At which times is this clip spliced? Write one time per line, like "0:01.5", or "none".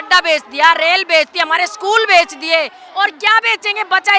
none